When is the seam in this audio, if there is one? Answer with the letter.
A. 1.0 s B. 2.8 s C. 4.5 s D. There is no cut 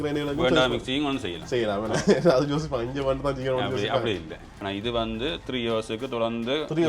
C